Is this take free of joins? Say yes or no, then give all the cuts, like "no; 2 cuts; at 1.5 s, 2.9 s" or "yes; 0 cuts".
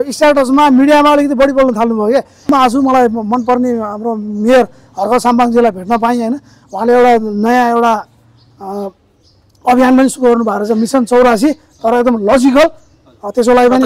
no; 1 cut; at 2.5 s